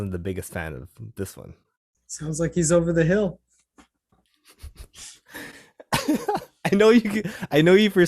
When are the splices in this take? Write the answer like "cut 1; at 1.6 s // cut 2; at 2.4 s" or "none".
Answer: none